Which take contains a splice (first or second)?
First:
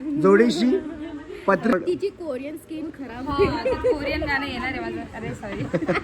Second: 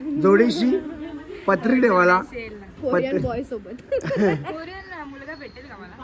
first